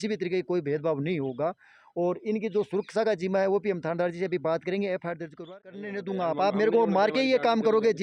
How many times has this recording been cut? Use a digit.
1